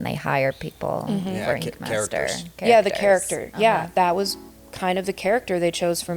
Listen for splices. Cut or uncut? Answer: uncut